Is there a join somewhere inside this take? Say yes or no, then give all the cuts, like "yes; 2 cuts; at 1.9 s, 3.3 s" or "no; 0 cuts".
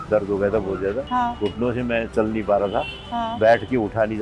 yes; 1 cut; at 1.0 s